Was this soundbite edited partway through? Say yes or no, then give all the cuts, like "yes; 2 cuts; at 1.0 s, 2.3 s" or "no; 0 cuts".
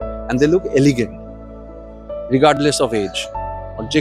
no; 0 cuts